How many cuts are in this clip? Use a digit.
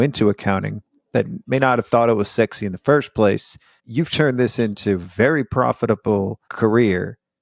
1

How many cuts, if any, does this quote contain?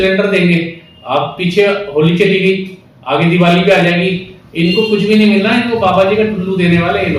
0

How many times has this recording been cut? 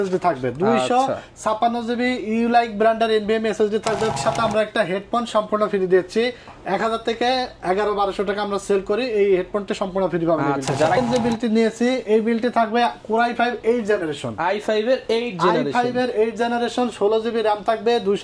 2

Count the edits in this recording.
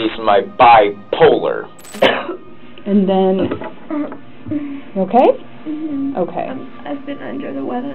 1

